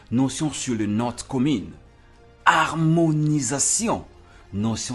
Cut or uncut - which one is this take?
uncut